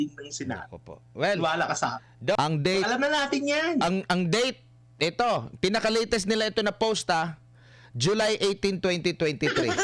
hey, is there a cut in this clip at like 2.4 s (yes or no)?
yes